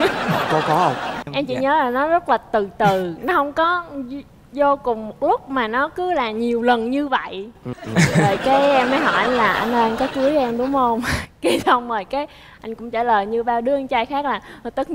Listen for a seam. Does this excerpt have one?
yes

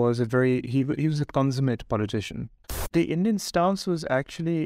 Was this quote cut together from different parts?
yes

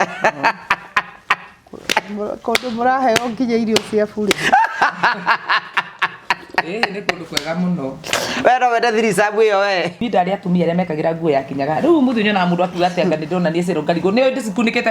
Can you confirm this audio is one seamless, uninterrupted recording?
no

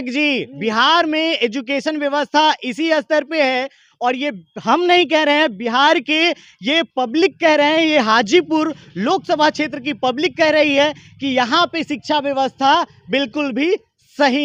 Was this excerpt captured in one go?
yes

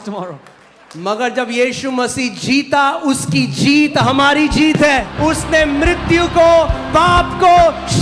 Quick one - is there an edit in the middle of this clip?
yes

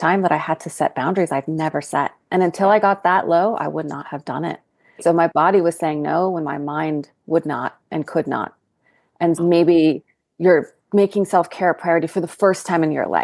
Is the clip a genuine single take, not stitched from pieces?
no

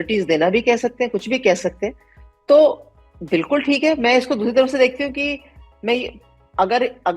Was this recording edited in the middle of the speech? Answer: no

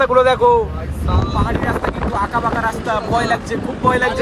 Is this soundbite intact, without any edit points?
yes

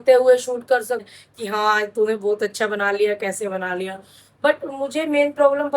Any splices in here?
yes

